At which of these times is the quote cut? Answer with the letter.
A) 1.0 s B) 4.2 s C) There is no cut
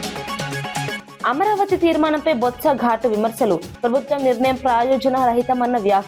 A